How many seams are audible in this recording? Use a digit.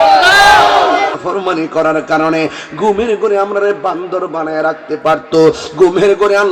1